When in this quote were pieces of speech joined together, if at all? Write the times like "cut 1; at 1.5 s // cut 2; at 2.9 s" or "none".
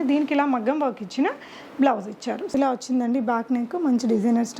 cut 1; at 2.5 s

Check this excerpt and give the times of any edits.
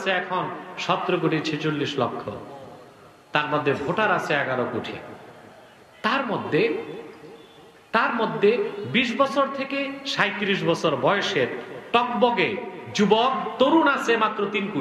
none

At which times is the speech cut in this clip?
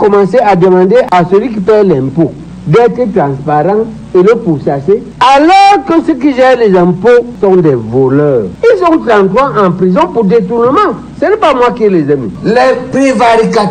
cut 1; at 1.1 s // cut 2; at 5.1 s // cut 3; at 8.5 s // cut 4; at 12.3 s

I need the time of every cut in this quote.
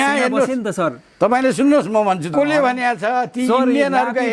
cut 1; at 2.3 s

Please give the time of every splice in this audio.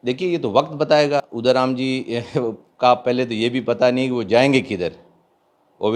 cut 1; at 1.3 s

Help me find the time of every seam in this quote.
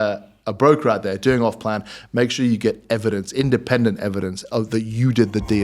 none

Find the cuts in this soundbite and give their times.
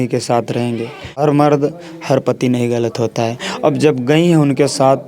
cut 1; at 1.2 s

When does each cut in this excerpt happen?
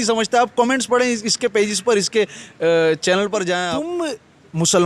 cut 1; at 3.5 s

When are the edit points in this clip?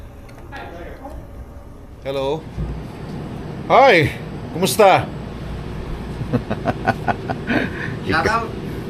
cut 1; at 1.9 s

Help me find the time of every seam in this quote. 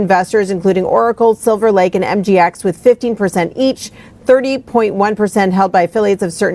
cut 1; at 0.9 s // cut 2; at 2.4 s

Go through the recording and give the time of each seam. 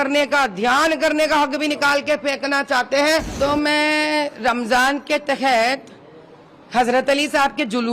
cut 1; at 3.3 s

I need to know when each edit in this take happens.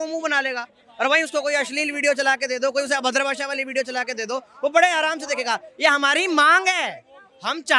none

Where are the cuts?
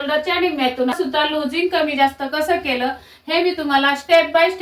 cut 1; at 0.9 s

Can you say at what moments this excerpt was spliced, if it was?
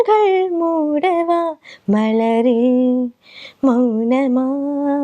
none

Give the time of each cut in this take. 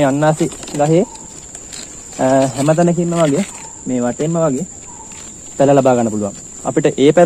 none

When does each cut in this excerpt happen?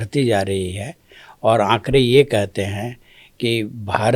none

